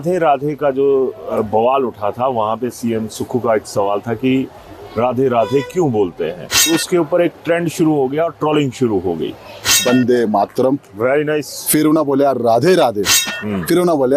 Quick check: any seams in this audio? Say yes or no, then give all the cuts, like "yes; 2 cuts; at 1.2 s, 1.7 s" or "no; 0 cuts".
yes; 2 cuts; at 6.6 s, 9.8 s